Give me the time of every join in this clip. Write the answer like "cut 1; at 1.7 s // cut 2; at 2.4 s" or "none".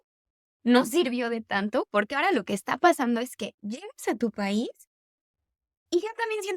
none